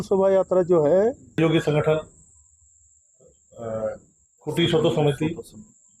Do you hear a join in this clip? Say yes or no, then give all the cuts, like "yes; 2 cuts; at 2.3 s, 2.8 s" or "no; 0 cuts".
yes; 1 cut; at 1.4 s